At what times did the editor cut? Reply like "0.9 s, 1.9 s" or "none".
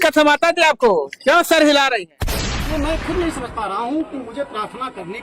2.4 s